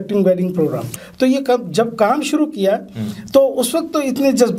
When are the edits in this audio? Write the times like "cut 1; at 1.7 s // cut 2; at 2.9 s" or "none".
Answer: cut 1; at 1.0 s